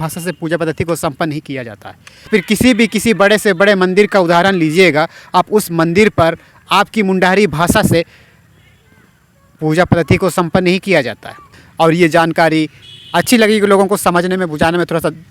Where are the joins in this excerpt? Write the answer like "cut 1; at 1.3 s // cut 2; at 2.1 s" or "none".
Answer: cut 1; at 2.3 s // cut 2; at 11.6 s

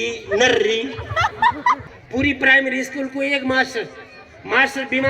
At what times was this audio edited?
cut 1; at 1.6 s

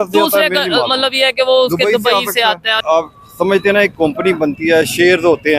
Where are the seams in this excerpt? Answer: cut 1; at 2.8 s

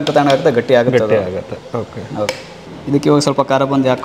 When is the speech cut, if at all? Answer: none

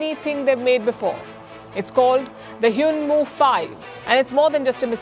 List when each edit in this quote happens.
cut 1; at 3.9 s

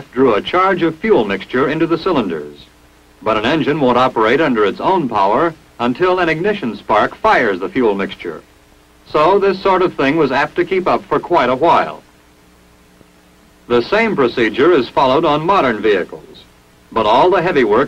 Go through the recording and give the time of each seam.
cut 1; at 10.0 s

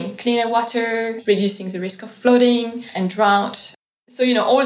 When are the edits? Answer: cut 1; at 1.1 s // cut 2; at 2.8 s // cut 3; at 3.7 s

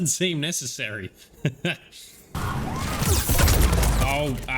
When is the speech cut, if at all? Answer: cut 1; at 2.3 s

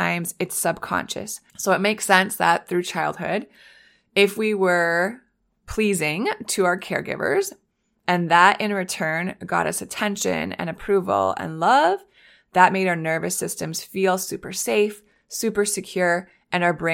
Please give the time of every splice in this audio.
cut 1; at 1.4 s

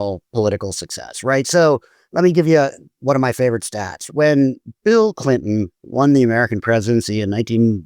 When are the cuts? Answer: cut 1; at 2.0 s // cut 2; at 2.9 s

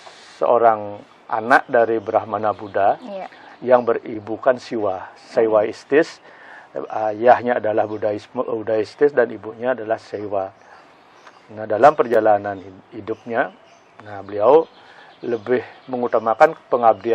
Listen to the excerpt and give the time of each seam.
none

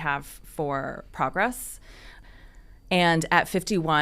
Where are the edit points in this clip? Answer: cut 1; at 2.2 s

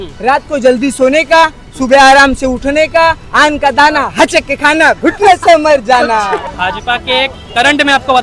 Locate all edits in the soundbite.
cut 1; at 6.5 s

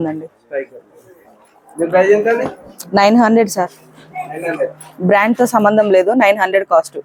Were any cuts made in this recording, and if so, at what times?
none

